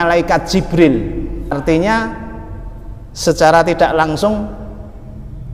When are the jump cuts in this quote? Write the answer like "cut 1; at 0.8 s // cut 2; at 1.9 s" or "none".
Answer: cut 1; at 1.5 s

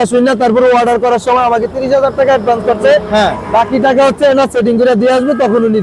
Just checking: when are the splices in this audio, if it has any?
none

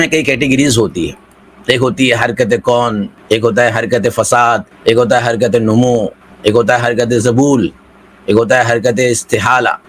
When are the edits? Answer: none

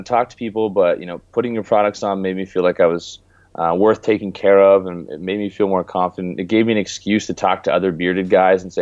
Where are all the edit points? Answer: none

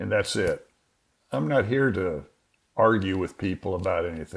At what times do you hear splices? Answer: cut 1; at 1.1 s

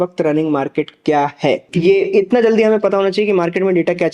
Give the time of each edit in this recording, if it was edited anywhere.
cut 1; at 1.7 s

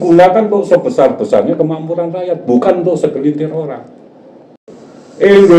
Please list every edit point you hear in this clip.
cut 1; at 4.7 s

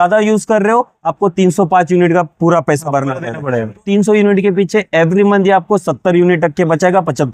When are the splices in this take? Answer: cut 1; at 3.8 s

